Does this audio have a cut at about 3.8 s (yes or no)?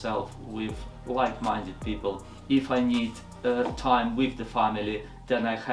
no